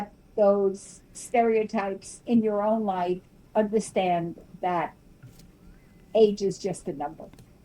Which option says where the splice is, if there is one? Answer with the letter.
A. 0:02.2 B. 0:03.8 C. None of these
A